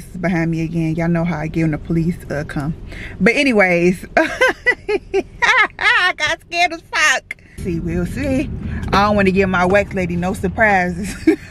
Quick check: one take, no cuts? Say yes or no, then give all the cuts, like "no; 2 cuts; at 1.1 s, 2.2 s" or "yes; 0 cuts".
no; 1 cut; at 7.6 s